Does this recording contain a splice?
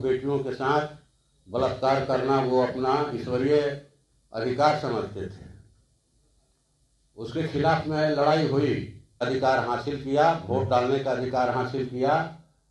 yes; 1 cut; at 9.2 s

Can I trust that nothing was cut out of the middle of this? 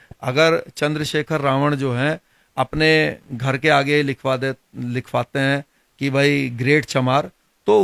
yes; 0 cuts

